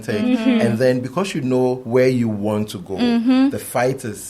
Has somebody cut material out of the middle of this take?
yes; 1 cut; at 1.8 s

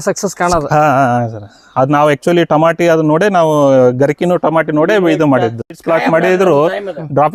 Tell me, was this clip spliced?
no; 0 cuts

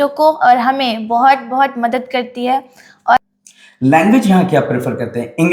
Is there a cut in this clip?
yes; 1 cut; at 3.2 s

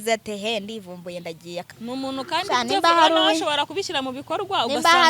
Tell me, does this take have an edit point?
yes; 1 cut; at 1.7 s

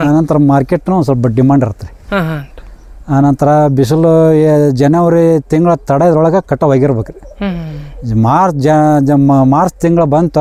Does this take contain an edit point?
no; 0 cuts

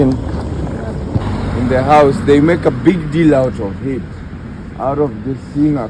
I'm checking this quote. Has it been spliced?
yes; 1 cut; at 1.2 s

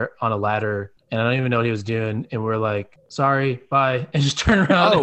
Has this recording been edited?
yes; 1 cut; at 3.0 s

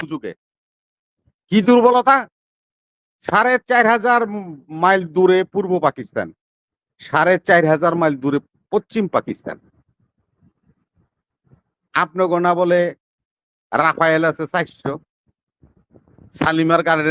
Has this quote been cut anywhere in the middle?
no; 0 cuts

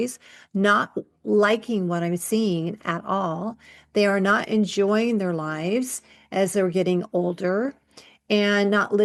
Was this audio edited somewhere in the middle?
no; 0 cuts

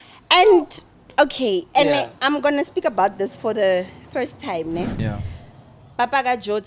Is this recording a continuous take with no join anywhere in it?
no; 1 cut; at 5.0 s

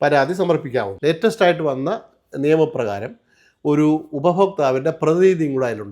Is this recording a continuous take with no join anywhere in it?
no; 1 cut; at 0.9 s

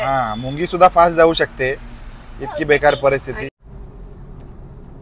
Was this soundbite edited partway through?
yes; 1 cut; at 3.5 s

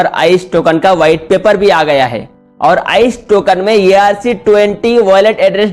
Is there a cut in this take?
no; 0 cuts

